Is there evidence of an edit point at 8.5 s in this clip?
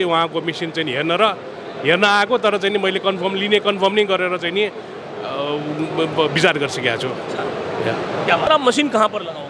yes; 1 cut; at 8.5 s

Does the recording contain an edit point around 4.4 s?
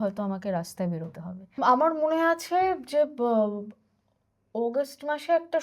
no; 1 cut; at 1.5 s

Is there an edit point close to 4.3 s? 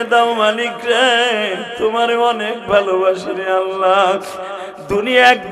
no; 0 cuts

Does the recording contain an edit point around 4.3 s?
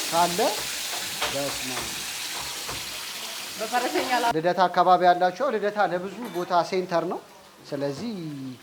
yes; 1 cut; at 4.3 s

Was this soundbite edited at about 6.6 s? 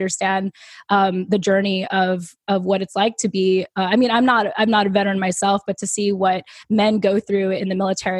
no; 0 cuts

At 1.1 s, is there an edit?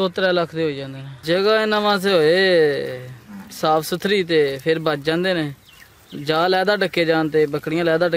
yes; 1 cut; at 1.1 s

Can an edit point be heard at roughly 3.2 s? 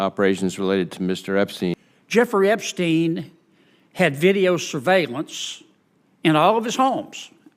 no; 1 cut; at 1.7 s

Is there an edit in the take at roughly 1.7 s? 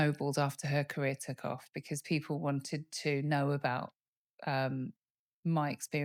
no; 0 cuts

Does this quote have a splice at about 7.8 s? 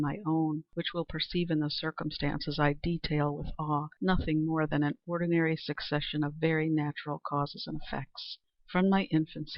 yes; 1 cut; at 7.8 s

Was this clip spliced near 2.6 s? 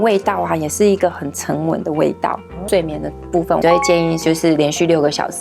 yes; 2 cuts; at 2.6 s, 3.6 s

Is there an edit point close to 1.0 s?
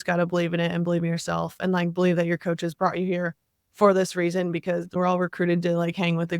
no; 1 cut; at 4.9 s

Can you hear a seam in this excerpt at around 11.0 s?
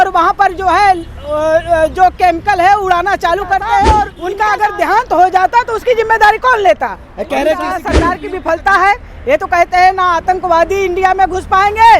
no; 2 cuts; at 4.2 s, 7.9 s

